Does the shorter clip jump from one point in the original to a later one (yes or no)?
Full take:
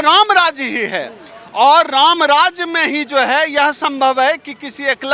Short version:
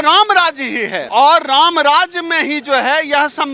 yes